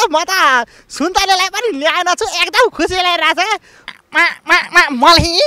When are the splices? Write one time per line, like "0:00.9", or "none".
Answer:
0:03.9